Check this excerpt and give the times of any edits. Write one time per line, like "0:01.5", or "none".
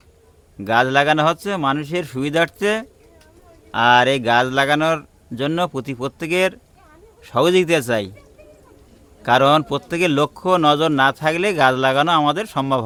none

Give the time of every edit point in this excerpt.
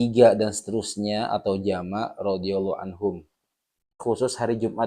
0:03.9

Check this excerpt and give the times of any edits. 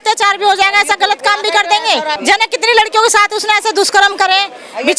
0:02.2

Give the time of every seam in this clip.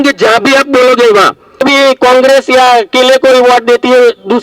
0:01.6

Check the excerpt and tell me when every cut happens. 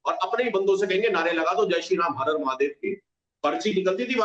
0:03.1

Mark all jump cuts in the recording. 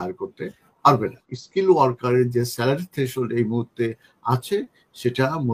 0:01.3

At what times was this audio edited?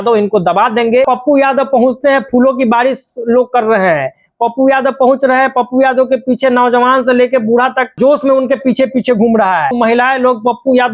0:01.1
0:07.9
0:09.7

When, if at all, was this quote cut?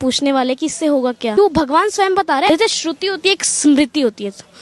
0:01.3
0:02.5

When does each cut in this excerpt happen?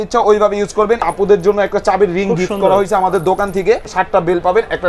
0:01.0
0:03.9

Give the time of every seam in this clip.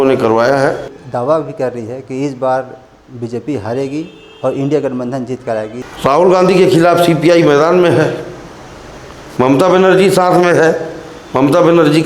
0:01.0
0:05.8

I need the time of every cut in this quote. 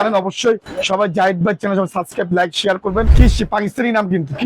0:03.1

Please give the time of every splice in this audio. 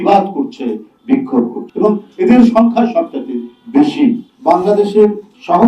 0:01.6
0:04.3

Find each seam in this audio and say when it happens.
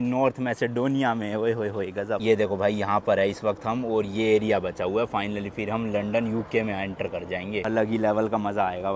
none

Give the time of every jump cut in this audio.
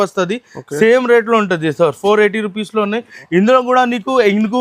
none

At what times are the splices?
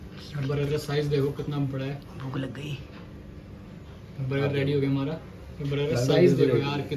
none

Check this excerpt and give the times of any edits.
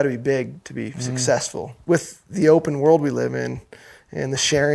0:01.7

